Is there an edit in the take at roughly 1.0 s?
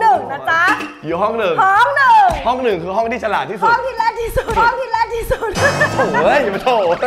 no; 0 cuts

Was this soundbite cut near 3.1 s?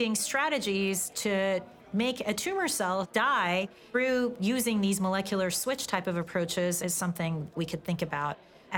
yes; 2 cuts; at 3.1 s, 7.5 s

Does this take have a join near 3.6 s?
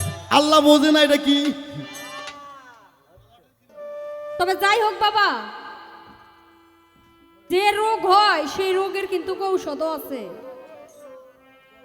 yes; 1 cut; at 3.6 s

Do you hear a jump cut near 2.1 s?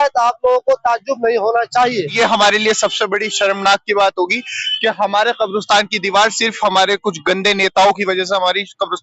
yes; 1 cut; at 2.1 s

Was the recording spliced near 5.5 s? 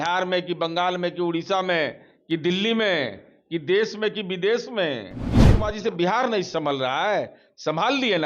yes; 1 cut; at 5.5 s

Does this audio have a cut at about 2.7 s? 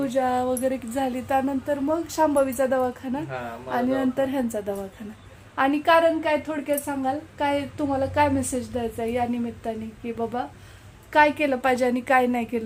no; 0 cuts

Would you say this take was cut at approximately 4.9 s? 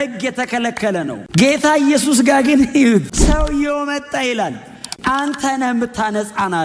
yes; 1 cut; at 4.9 s

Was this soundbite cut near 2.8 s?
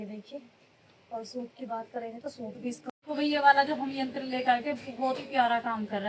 yes; 1 cut; at 2.8 s

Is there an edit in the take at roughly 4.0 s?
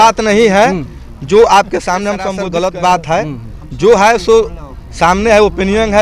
no; 1 cut; at 2.3 s

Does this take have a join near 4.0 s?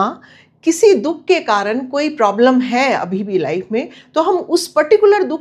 yes; 1 cut; at 4.0 s

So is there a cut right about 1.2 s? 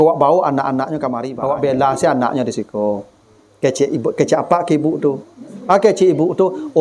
yes; 1 cut; at 1.2 s

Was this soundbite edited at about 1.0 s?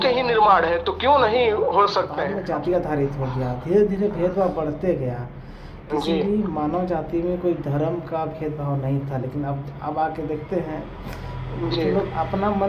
no; 1 cut; at 2.3 s

